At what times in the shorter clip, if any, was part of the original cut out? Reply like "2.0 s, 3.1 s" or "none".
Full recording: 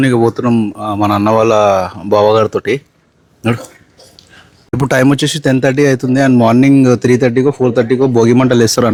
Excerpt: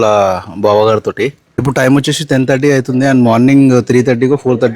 1.4 s